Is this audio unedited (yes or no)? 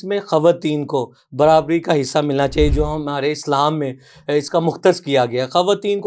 yes